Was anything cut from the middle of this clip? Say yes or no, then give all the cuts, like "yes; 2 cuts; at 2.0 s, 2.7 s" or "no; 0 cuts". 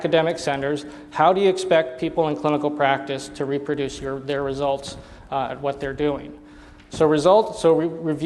no; 0 cuts